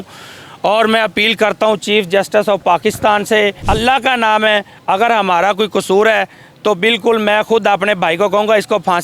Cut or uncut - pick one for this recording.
cut